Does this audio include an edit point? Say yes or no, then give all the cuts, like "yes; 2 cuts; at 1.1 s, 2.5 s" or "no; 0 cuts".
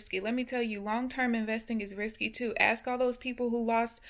no; 0 cuts